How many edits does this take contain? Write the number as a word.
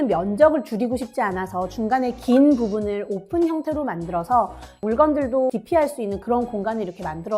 two